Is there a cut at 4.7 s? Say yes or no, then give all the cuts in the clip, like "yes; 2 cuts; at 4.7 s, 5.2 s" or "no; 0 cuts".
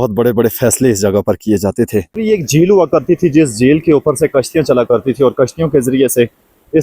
no; 1 cut; at 2.1 s